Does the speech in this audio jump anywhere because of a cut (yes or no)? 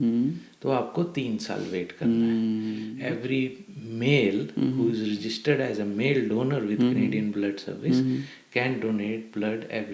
yes